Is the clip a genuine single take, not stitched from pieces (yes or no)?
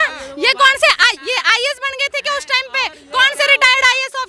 yes